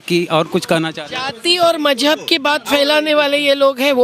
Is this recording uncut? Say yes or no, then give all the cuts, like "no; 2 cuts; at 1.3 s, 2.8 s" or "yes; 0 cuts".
yes; 0 cuts